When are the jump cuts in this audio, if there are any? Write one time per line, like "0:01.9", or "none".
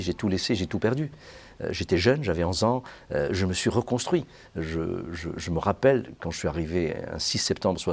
none